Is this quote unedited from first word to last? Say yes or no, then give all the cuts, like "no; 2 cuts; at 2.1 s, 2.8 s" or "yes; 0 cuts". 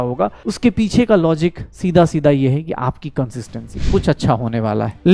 no; 1 cut; at 3.9 s